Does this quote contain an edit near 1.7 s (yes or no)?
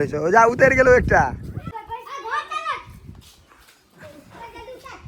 yes